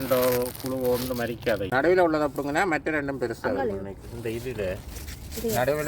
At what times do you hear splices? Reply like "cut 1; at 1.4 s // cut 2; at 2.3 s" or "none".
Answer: cut 1; at 1.7 s